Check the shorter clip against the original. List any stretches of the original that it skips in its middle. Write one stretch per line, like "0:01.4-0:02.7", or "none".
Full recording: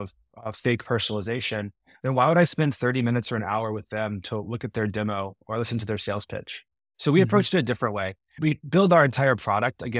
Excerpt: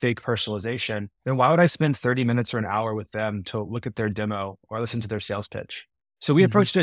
0:01.7-0:01.9